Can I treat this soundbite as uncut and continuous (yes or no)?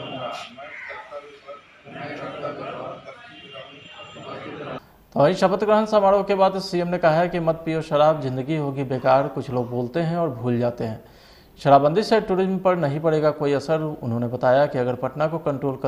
no